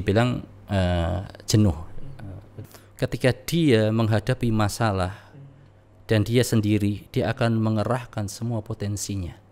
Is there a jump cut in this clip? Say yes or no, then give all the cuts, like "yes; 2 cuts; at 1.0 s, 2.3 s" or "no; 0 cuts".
yes; 1 cut; at 2.5 s